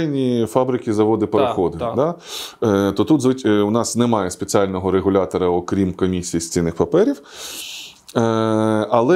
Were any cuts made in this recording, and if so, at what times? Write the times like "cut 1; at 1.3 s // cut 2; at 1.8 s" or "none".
none